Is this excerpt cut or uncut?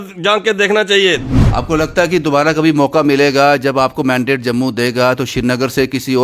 cut